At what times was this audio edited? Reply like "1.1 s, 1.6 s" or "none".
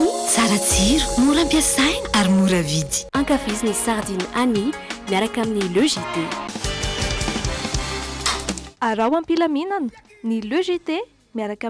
none